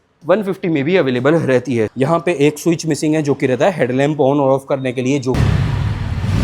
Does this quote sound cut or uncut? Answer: cut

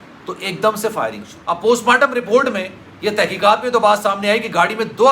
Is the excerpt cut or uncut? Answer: cut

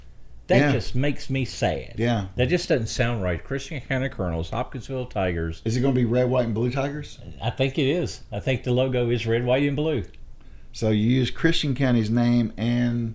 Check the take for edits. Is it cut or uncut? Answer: cut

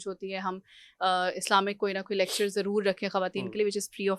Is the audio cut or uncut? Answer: uncut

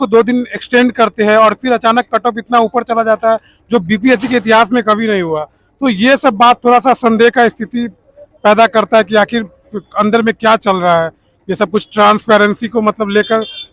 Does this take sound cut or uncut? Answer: uncut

